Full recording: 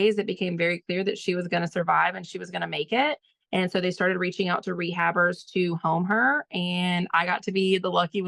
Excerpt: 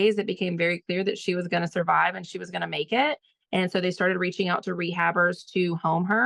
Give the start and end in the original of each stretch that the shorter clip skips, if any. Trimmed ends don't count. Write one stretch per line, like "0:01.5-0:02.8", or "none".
none